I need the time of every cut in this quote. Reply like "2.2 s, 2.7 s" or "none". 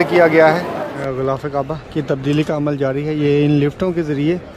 1.0 s